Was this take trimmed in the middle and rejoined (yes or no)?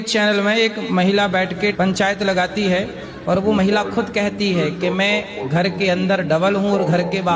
no